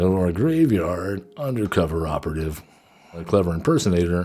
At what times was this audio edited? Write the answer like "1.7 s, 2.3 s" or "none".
3.2 s